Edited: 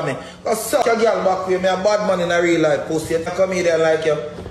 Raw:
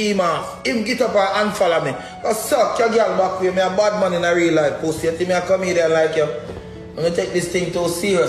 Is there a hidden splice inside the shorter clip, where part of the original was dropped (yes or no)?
yes